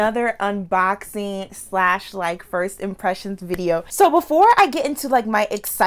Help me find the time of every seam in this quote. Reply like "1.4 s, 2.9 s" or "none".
3.9 s